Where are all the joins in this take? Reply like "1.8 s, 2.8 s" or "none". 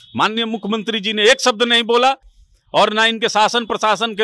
none